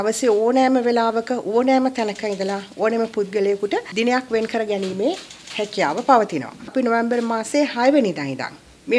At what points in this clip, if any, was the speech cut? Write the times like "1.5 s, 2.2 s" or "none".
3.9 s